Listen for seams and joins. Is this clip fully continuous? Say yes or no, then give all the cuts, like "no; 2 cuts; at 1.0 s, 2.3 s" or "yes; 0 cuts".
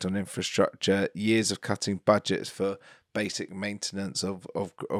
yes; 0 cuts